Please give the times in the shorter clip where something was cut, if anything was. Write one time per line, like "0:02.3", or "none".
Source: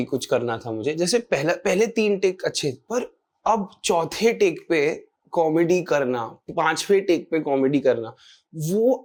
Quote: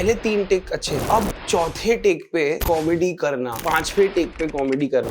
0:00.9
0:02.6
0:03.5